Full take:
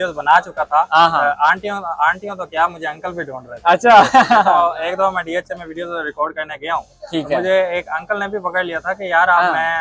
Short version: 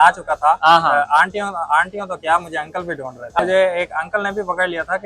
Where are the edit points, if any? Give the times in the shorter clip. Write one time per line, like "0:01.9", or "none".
0:03.4